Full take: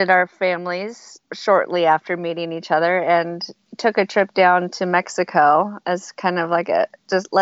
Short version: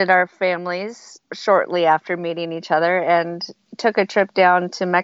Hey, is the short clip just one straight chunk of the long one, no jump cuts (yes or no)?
yes